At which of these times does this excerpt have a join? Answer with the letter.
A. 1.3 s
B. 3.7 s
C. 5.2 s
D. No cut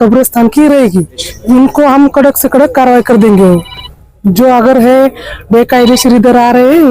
A